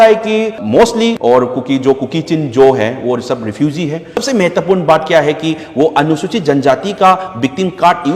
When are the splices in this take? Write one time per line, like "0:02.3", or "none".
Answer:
0:04.2